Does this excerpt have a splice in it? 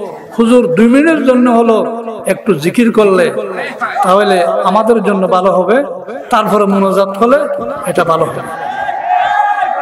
no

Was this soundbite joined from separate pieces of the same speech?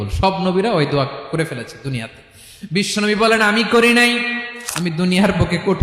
yes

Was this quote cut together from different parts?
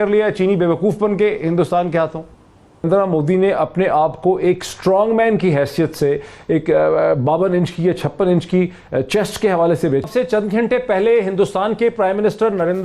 yes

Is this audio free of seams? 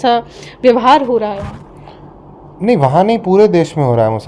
yes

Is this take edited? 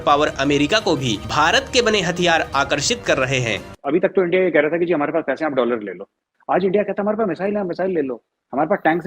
yes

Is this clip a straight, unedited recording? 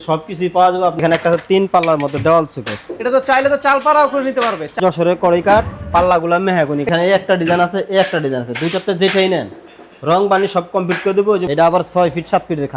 no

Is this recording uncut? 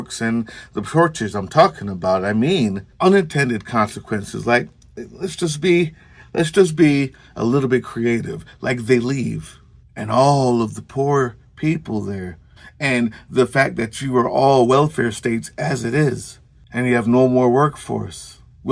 yes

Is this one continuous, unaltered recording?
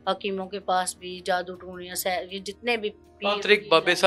yes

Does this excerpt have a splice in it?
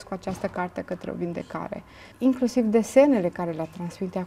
yes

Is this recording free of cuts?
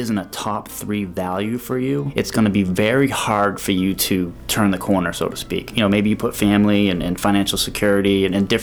no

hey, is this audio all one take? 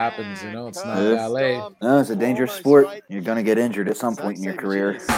no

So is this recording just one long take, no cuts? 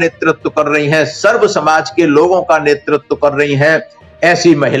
yes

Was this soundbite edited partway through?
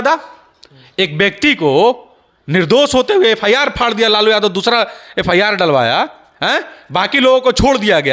no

